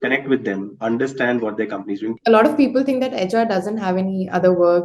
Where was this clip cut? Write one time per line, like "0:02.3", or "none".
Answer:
0:02.1